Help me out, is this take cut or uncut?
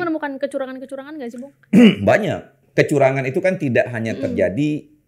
cut